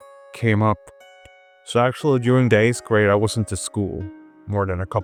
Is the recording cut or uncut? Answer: uncut